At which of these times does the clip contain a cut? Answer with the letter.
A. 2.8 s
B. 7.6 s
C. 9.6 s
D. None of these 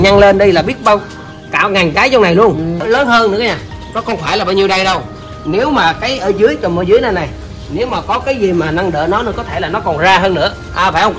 A